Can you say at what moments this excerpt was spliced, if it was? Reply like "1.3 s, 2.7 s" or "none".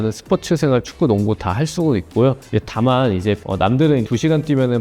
2.4 s